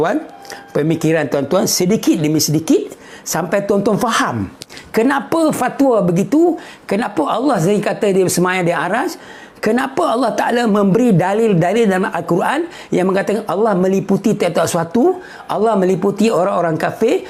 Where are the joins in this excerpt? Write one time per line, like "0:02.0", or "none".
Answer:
none